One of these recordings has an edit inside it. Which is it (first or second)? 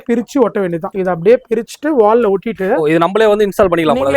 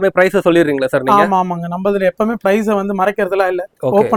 first